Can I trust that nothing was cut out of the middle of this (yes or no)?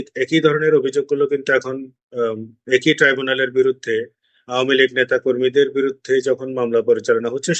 yes